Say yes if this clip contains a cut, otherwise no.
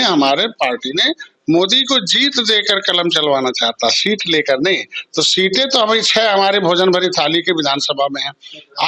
no